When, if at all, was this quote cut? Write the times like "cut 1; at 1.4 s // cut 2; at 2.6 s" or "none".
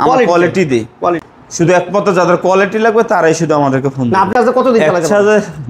cut 1; at 1.2 s // cut 2; at 4.3 s